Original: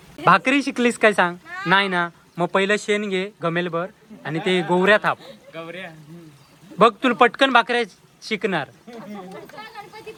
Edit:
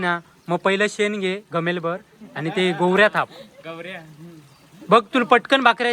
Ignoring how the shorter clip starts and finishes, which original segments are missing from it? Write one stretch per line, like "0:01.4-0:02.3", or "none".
none